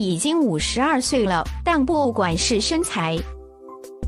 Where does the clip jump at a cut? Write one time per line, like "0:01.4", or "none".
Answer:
none